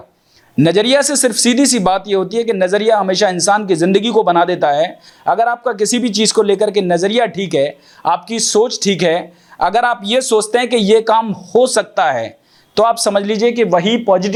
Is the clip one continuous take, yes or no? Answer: yes